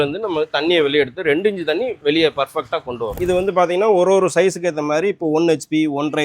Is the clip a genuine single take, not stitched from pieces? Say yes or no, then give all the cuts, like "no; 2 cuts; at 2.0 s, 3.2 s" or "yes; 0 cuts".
no; 1 cut; at 3.2 s